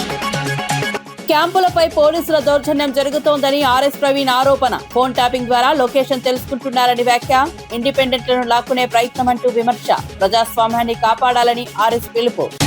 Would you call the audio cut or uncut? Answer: cut